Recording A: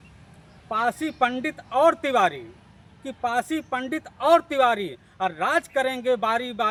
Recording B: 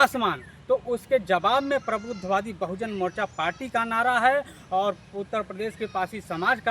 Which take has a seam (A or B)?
B